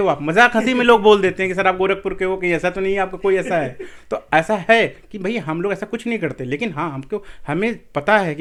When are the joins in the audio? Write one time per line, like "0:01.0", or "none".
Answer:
none